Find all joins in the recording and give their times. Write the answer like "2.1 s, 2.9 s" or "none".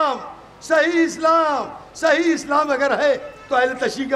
none